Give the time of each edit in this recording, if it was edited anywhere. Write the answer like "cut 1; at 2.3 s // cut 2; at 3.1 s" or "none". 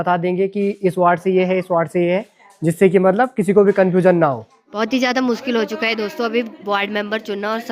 none

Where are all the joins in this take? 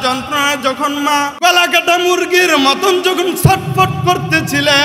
cut 1; at 1.3 s

